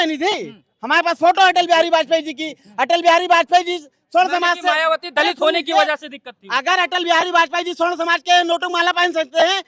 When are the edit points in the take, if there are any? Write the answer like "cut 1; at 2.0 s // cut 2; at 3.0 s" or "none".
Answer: none

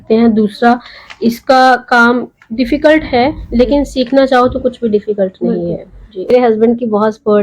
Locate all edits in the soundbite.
cut 1; at 6.3 s

